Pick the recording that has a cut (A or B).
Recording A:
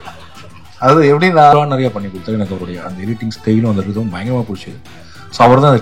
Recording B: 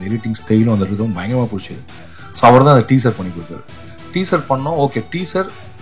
A